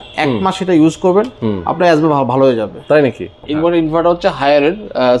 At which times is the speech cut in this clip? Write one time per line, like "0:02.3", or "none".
0:03.4